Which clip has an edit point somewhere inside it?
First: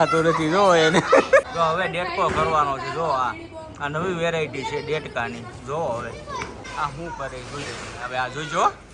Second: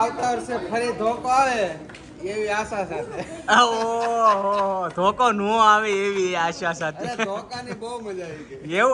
first; 2 cuts; at 1.5 s, 6.6 s

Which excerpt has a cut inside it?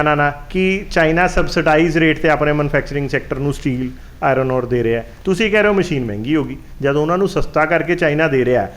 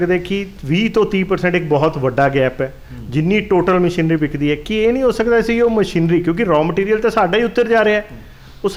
first; 1 cut; at 5.1 s

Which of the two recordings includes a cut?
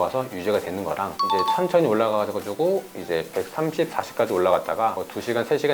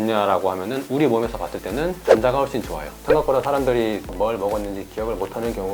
second; 1 cut; at 2.9 s

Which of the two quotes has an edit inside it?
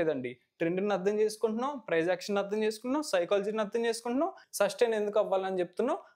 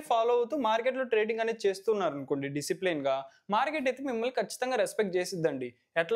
first; 1 cut; at 4.4 s

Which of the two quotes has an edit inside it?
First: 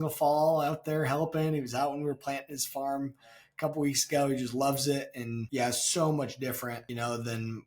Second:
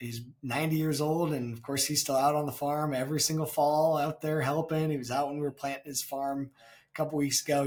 first; 2 cuts; at 5.3 s, 6.8 s

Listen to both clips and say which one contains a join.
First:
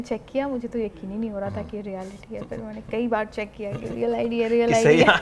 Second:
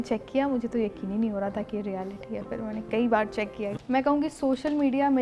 second; 1 cut; at 3.7 s

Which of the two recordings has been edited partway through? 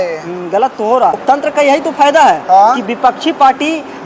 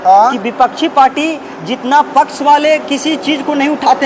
first; 1 cut; at 1.2 s

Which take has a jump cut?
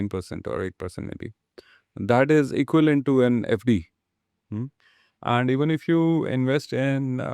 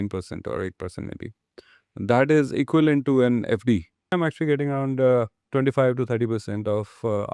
second; 2 cuts; at 4.1 s, 5.4 s

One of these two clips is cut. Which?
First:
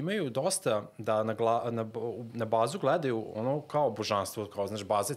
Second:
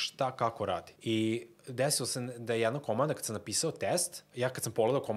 second; 2 cuts; at 0.9 s, 4.2 s

